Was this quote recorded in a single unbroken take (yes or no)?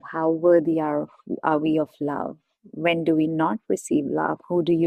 yes